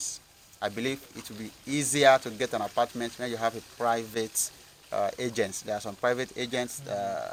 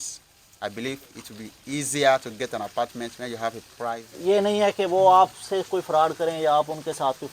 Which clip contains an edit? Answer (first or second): second